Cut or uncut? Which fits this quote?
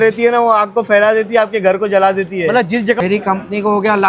cut